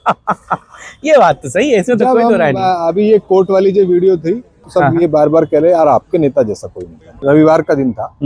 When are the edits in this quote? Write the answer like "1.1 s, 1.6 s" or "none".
4.6 s, 7.1 s